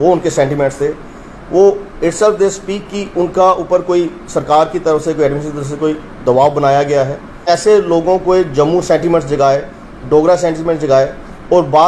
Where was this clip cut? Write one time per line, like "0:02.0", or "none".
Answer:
0:07.4